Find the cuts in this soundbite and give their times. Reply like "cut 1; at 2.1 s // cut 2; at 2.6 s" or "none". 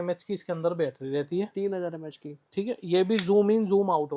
none

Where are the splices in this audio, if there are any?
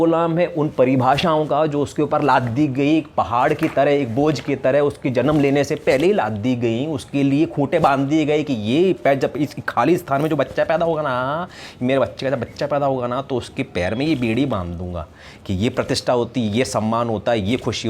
none

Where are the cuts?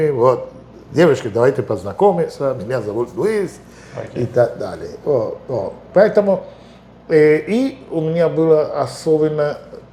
none

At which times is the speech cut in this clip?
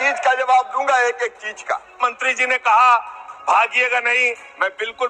cut 1; at 2.0 s

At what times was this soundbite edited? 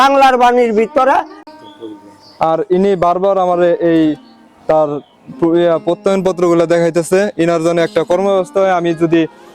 cut 1; at 1.3 s

